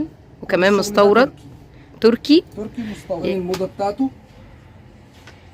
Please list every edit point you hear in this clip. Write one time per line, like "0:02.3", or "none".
0:03.1